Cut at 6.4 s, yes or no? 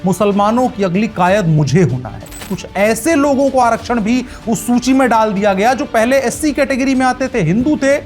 no